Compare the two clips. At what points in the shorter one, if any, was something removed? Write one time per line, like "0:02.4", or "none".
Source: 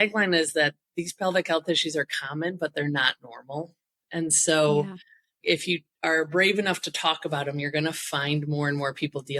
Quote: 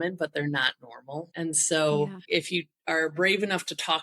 0:01.3
0:02.2